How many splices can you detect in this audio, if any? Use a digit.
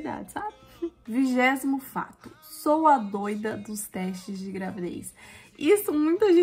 1